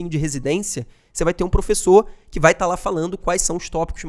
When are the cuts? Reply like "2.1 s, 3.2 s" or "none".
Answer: none